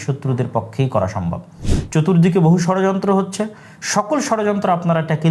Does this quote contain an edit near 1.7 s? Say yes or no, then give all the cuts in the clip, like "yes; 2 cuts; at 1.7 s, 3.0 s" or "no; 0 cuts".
yes; 1 cut; at 1.7 s